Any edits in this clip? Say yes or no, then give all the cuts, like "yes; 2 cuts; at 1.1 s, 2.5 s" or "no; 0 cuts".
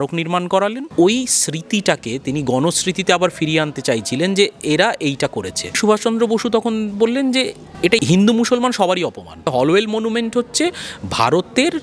yes; 4 cuts; at 0.9 s, 5.8 s, 7.9 s, 9.5 s